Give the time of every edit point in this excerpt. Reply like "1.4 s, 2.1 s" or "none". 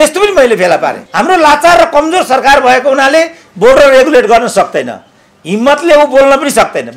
1.0 s